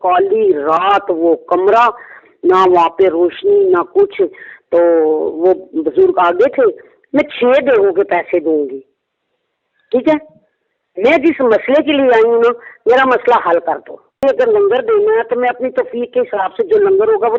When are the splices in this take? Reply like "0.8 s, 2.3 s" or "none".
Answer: 6.9 s, 14.2 s